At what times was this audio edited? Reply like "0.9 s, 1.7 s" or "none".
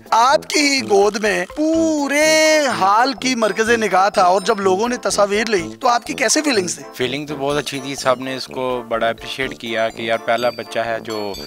none